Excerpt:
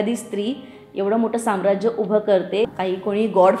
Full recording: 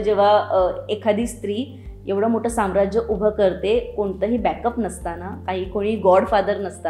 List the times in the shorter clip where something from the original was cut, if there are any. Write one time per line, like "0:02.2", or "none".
0:02.7